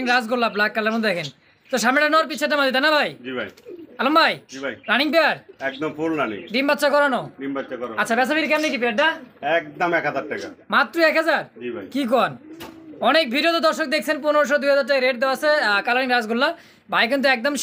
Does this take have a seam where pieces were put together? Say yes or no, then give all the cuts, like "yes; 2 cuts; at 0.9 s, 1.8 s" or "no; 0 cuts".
no; 0 cuts